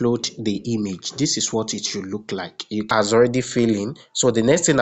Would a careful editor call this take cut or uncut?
cut